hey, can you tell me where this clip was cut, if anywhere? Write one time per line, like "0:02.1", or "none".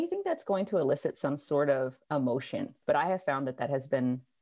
0:02.7